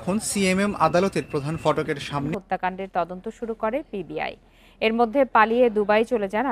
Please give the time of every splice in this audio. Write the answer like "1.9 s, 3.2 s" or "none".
2.3 s